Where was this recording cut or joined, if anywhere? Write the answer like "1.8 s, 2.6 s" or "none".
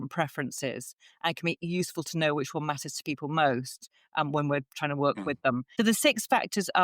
5.7 s